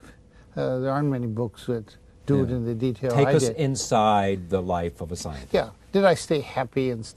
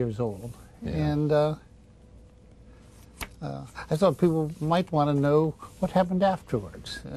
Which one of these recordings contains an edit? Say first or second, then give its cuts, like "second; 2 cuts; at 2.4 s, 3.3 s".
first; 1 cut; at 3.5 s